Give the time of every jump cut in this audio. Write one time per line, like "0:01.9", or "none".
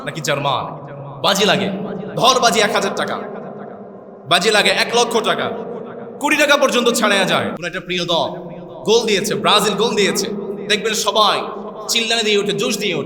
0:07.7